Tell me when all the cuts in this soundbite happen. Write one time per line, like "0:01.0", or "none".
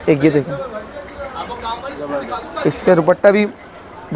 none